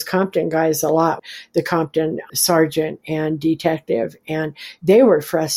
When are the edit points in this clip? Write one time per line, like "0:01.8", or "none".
0:01.2
0:02.3